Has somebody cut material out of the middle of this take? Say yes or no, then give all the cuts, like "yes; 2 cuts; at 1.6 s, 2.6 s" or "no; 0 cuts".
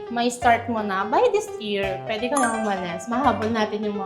no; 0 cuts